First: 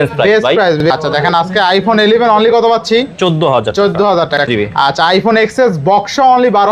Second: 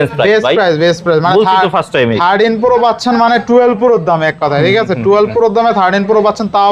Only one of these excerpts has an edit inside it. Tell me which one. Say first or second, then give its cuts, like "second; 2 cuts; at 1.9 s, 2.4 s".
first; 2 cuts; at 0.8 s, 4.5 s